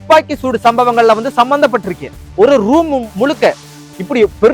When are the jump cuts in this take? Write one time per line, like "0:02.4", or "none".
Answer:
0:02.2